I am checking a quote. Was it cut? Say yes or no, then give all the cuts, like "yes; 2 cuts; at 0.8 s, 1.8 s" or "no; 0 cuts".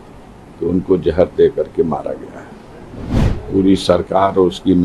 yes; 1 cut; at 3.3 s